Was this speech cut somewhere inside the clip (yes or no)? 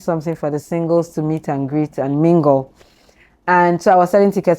no